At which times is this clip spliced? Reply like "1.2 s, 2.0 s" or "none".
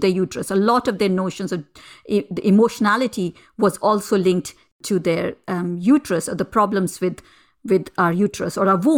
4.8 s